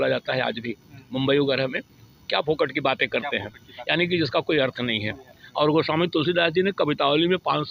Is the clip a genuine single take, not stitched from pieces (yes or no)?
yes